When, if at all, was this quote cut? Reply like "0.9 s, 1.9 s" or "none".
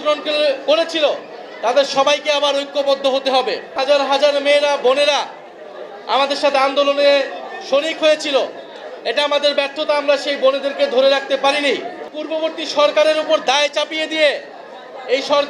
3.7 s, 12.2 s